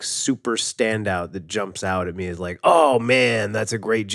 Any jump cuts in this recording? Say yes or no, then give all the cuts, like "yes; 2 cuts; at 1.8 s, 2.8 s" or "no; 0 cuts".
no; 0 cuts